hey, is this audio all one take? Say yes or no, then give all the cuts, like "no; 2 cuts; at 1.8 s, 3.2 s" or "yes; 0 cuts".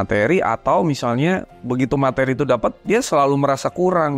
yes; 0 cuts